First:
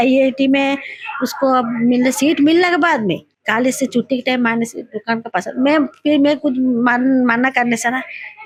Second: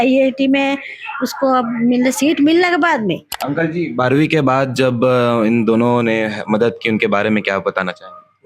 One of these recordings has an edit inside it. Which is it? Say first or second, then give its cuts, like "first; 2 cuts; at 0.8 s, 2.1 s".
second; 1 cut; at 3.3 s